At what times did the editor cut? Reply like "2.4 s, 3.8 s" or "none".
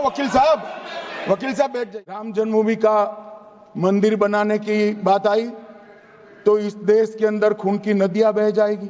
2.3 s